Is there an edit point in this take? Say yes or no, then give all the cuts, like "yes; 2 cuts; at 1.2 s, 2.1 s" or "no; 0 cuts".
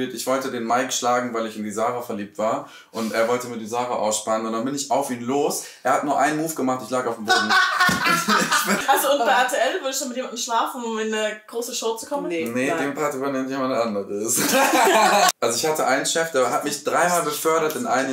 yes; 2 cuts; at 8.8 s, 15.3 s